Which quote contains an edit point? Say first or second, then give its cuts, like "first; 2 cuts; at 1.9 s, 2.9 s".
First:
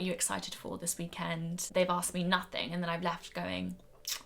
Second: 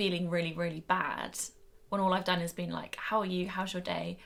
first; 1 cut; at 1.6 s